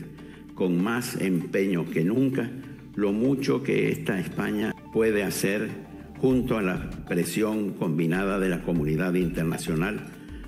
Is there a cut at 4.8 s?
yes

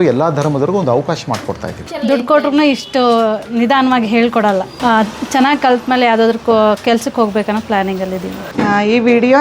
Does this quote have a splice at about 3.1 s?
no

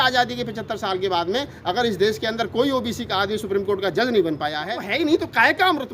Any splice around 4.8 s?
yes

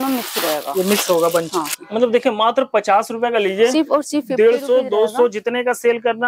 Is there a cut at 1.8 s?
yes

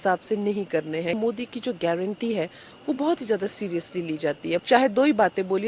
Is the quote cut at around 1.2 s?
yes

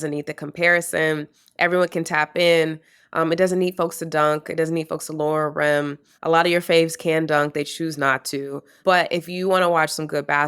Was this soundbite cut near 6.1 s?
yes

